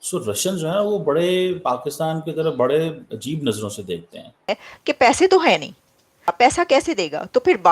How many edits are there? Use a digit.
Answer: 1